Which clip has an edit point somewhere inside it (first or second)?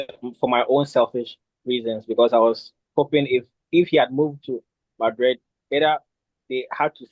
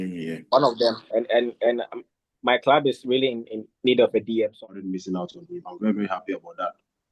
second